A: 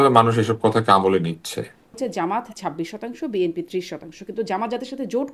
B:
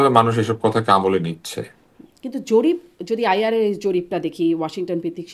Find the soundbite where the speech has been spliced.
A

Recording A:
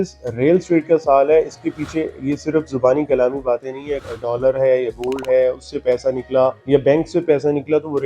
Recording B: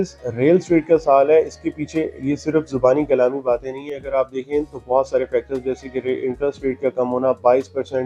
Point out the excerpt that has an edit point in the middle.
A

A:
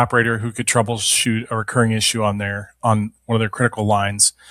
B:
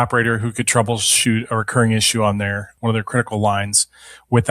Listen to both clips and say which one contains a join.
B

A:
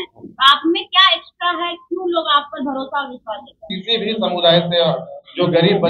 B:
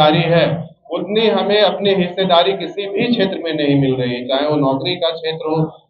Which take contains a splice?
A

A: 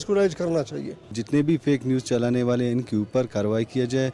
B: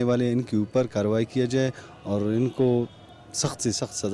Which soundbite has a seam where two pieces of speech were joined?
A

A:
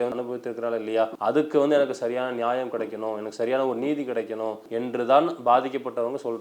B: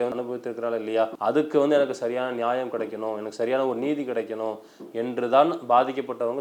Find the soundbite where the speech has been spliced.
A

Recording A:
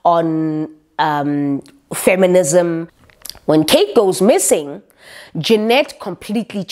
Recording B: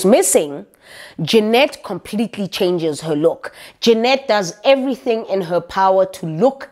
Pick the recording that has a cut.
A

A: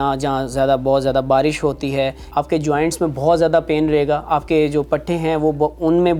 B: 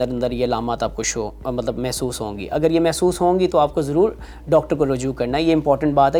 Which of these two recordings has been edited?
A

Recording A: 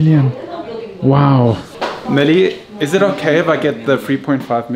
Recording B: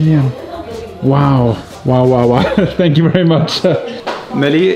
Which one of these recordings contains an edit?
A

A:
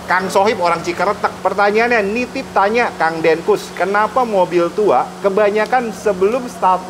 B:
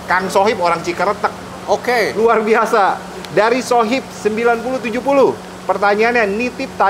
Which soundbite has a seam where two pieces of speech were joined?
A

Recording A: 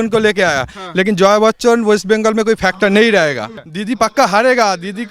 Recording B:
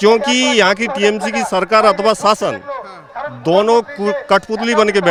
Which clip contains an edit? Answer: A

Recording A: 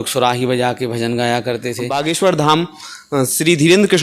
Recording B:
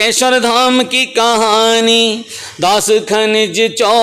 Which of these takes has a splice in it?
A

